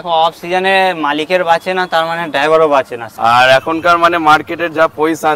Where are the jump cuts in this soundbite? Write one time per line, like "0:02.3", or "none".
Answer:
0:03.0